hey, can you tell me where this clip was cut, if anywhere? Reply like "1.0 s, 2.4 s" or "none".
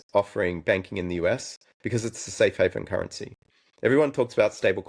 none